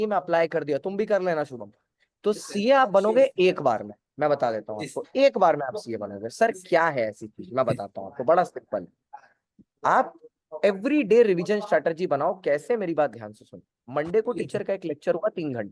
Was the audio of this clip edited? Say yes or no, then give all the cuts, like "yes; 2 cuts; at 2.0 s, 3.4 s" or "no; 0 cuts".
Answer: no; 0 cuts